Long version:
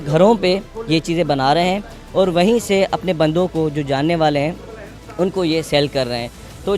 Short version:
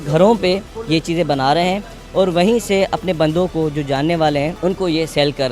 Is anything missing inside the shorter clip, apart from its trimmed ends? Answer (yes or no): yes